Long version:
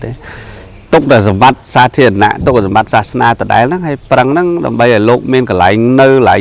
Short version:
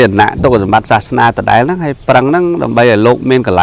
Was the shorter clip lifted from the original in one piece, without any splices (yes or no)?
yes